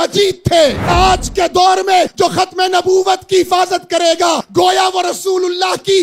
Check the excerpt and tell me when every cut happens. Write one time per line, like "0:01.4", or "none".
0:00.9
0:02.1
0:04.4